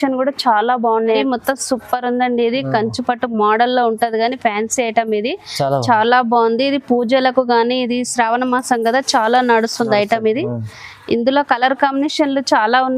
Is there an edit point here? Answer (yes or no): yes